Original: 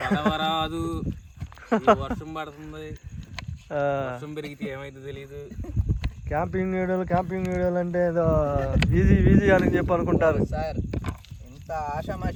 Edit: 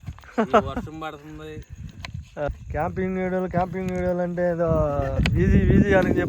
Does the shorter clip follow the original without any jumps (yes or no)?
no